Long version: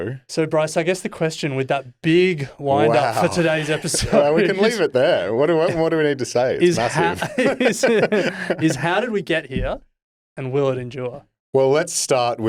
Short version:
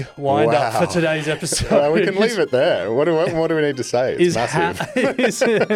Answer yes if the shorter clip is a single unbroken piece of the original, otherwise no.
yes